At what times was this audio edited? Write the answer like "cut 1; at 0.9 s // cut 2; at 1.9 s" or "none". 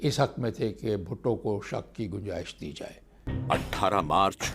cut 1; at 3.3 s